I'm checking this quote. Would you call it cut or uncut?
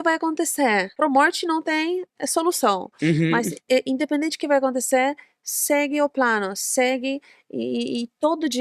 cut